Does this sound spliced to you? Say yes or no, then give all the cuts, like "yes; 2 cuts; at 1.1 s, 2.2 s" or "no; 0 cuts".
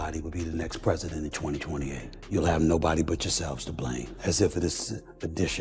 yes; 2 cuts; at 2.1 s, 4.1 s